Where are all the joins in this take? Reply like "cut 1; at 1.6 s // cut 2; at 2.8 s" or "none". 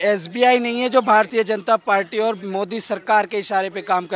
cut 1; at 1.3 s